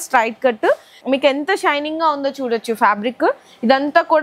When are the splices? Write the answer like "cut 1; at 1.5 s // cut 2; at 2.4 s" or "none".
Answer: cut 1; at 0.9 s